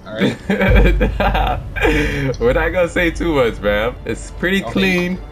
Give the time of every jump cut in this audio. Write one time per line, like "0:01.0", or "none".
0:04.1